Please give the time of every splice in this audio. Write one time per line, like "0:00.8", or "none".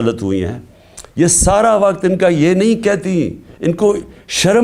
none